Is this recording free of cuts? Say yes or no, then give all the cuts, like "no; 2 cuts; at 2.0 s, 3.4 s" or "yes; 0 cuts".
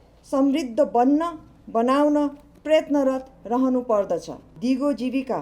no; 1 cut; at 4.4 s